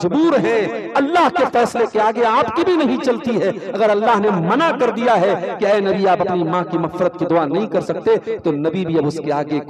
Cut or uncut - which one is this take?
uncut